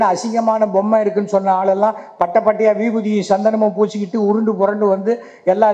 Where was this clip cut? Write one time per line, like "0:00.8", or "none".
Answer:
none